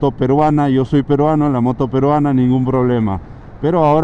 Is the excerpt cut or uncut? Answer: uncut